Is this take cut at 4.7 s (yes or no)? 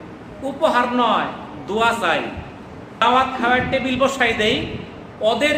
no